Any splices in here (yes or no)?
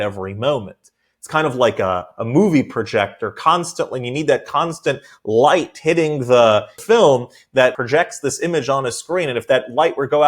yes